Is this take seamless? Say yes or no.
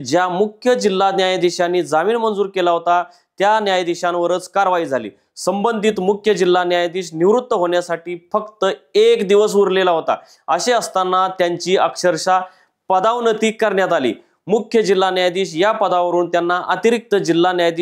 yes